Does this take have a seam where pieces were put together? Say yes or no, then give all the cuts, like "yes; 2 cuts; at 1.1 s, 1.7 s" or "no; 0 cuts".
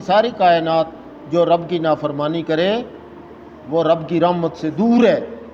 no; 0 cuts